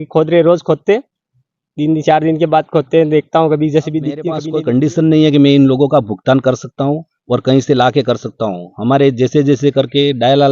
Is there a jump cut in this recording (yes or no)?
yes